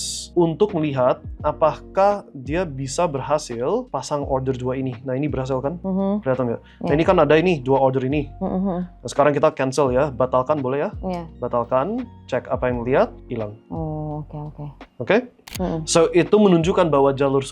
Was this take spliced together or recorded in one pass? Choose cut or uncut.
cut